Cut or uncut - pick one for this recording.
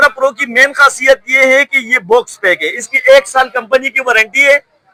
uncut